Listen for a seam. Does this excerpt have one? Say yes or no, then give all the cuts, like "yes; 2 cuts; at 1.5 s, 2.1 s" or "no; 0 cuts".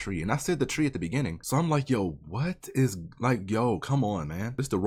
no; 0 cuts